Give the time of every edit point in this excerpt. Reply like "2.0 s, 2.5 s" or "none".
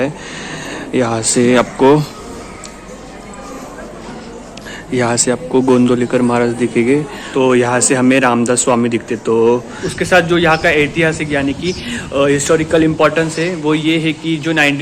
7.2 s, 9.8 s